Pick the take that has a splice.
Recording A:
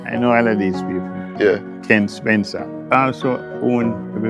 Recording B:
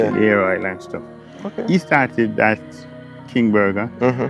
A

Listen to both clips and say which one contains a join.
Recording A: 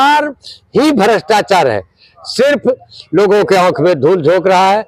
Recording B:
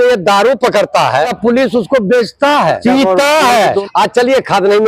B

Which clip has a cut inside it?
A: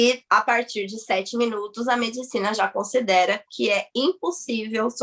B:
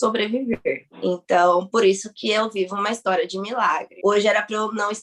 B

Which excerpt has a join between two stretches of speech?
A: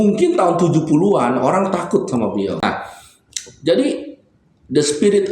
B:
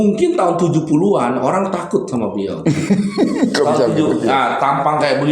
A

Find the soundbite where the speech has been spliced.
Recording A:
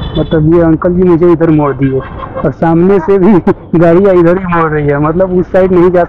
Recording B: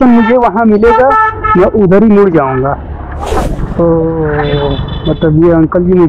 B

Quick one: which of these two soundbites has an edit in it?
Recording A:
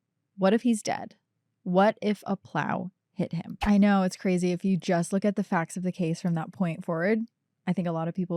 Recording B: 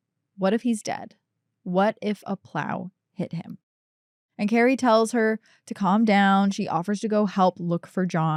A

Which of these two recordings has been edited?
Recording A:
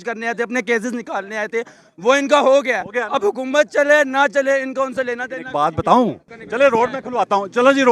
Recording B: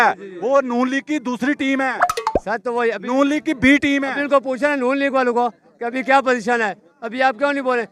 A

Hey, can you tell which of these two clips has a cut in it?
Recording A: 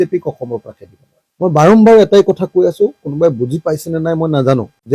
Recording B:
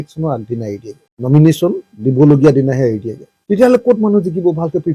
A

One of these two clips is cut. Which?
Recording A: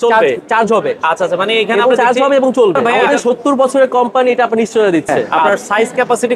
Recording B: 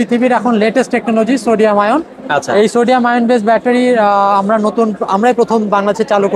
A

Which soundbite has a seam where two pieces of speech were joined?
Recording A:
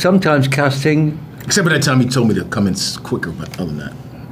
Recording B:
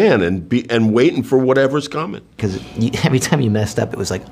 B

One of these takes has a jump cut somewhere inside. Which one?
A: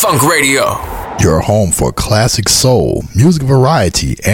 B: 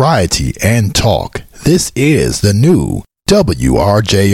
A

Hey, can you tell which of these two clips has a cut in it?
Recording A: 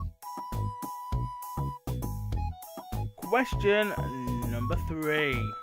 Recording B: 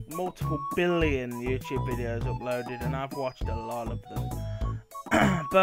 A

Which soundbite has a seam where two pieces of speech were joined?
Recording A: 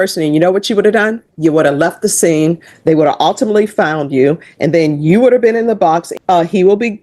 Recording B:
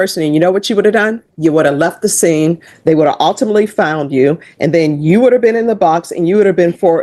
A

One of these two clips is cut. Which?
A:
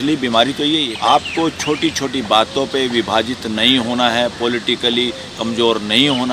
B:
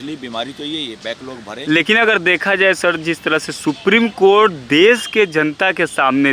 A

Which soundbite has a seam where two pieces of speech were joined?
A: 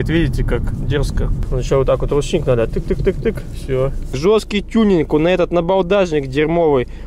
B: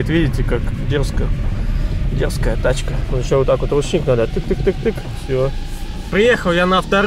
A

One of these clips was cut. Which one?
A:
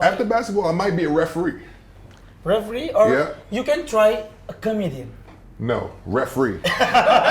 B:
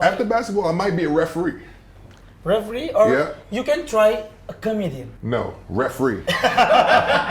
B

